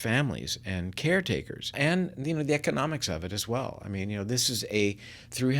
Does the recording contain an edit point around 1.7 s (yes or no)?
yes